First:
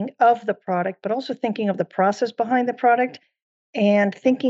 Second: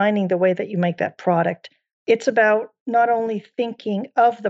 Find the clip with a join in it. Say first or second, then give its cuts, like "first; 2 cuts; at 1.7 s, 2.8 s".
second; 1 cut; at 2.0 s